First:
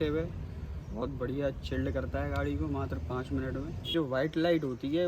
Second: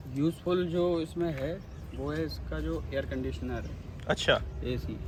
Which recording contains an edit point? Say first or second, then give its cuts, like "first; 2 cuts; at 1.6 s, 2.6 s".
first; 1 cut; at 3.9 s